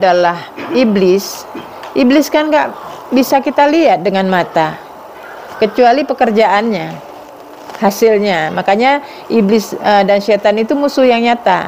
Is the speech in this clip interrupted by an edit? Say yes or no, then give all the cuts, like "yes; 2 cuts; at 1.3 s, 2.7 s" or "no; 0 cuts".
no; 0 cuts